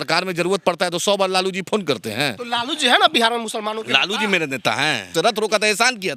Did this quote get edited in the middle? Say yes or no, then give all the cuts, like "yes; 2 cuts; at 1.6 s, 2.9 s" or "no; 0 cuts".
yes; 1 cut; at 5.1 s